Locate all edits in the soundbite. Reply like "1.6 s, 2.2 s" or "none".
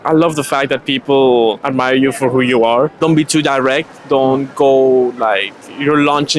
1.6 s, 2.9 s